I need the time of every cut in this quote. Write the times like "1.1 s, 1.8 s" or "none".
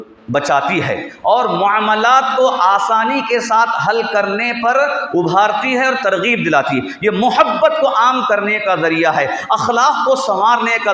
none